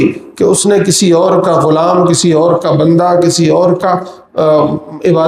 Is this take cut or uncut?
uncut